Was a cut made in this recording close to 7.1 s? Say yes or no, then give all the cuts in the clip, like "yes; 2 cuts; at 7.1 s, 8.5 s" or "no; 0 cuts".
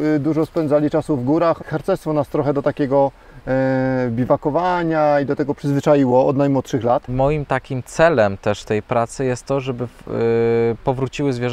yes; 2 cuts; at 1.6 s, 7.1 s